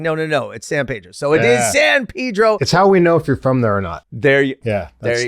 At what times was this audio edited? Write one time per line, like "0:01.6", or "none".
0:02.6

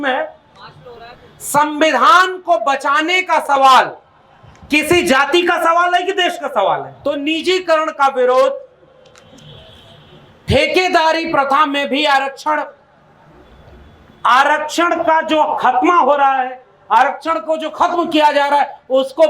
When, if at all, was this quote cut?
0:06.9

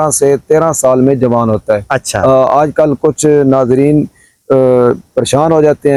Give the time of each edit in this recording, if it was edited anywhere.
none

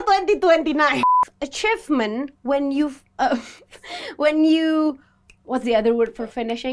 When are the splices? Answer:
0:01.1

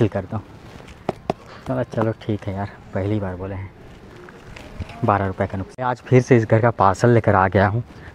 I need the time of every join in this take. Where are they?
0:05.7

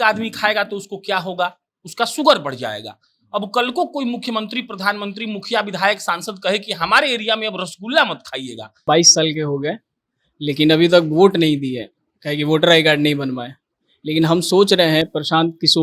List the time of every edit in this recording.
0:08.8

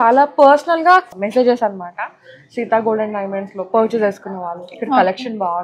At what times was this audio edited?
0:01.1

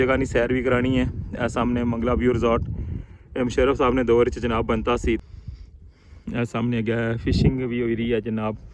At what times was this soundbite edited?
0:05.2

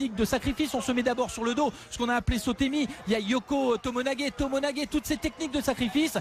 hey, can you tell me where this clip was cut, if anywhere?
none

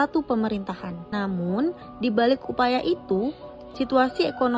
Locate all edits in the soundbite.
0:00.9

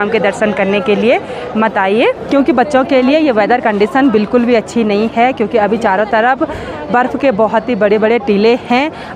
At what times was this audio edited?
none

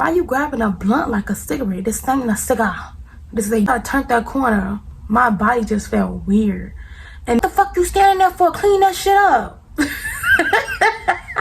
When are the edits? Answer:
0:03.7
0:07.4

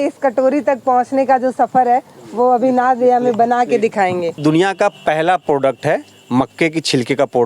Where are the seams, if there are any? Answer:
0:04.4

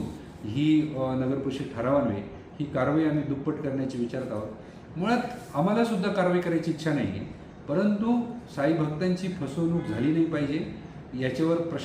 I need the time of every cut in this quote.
none

